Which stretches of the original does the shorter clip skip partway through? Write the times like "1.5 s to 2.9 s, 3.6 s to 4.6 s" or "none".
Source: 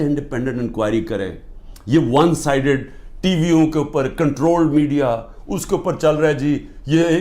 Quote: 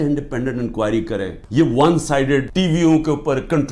1.4 s to 1.7 s, 2.8 s to 3.2 s